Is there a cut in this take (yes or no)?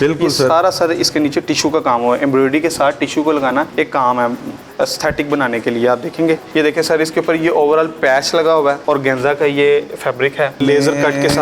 yes